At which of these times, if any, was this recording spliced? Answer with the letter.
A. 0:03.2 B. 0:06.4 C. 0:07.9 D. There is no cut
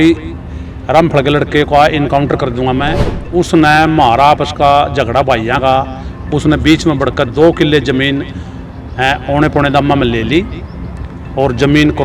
A